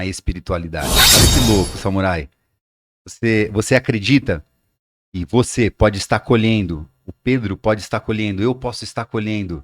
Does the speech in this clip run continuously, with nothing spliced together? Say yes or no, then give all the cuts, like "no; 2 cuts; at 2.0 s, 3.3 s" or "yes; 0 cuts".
no; 1 cut; at 1.0 s